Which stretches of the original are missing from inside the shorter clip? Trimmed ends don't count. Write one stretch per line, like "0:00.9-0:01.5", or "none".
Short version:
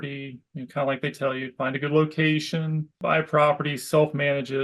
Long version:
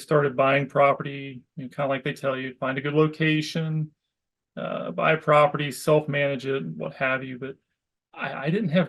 0:04.0-0:04.9